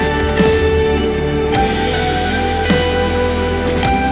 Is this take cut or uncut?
uncut